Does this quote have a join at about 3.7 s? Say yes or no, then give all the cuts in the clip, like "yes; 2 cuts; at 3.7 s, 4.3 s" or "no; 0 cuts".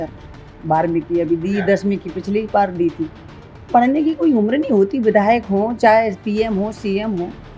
yes; 1 cut; at 3.7 s